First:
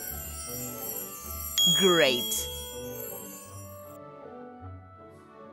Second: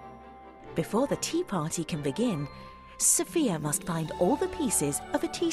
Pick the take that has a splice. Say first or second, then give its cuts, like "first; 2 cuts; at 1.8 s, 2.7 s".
first; 3 cuts; at 1.5 s, 2.3 s, 4.5 s